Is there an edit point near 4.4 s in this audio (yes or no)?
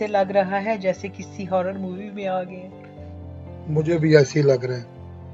no